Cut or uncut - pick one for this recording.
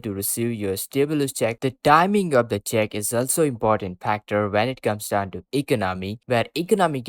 cut